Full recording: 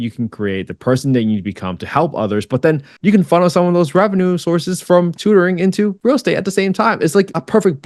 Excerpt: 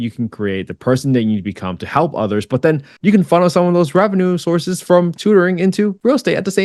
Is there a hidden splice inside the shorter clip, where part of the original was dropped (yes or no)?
no